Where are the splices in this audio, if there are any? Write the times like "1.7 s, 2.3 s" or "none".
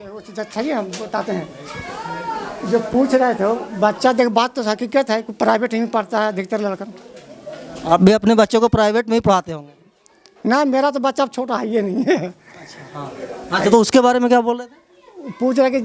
none